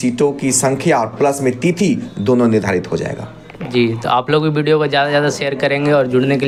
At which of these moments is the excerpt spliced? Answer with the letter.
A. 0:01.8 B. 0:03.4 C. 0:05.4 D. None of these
D